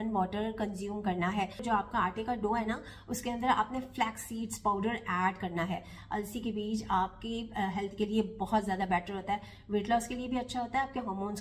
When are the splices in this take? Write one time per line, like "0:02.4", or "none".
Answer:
0:01.6